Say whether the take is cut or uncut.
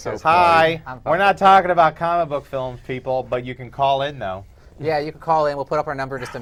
uncut